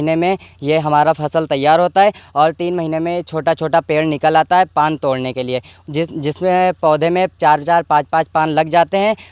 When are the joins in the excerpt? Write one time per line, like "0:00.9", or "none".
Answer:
none